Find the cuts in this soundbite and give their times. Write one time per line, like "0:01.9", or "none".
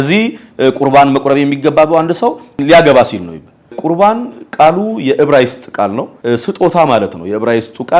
0:02.6
0:03.8
0:06.1